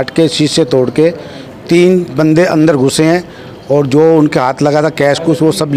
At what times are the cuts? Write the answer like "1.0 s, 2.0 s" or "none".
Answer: none